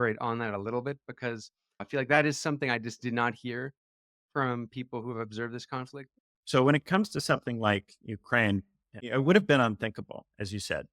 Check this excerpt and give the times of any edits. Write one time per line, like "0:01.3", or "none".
0:01.8
0:06.0